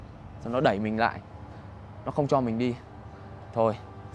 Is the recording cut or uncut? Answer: uncut